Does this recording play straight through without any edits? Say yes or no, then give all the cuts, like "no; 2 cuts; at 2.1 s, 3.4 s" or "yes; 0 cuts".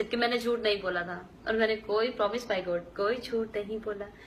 yes; 0 cuts